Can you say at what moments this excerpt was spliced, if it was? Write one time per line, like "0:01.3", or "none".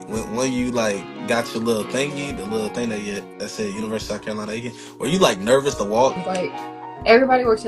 0:06.3